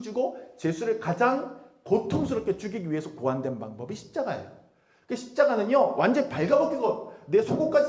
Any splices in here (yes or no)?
no